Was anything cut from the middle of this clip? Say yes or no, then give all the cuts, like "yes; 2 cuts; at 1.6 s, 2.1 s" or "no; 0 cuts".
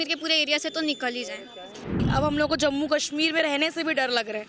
yes; 1 cut; at 2.0 s